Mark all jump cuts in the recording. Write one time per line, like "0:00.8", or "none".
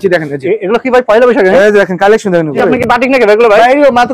0:02.6